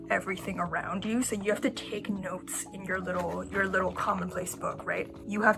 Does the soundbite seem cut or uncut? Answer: uncut